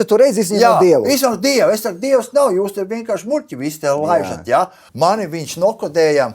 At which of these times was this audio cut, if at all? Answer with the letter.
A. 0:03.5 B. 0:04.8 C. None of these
B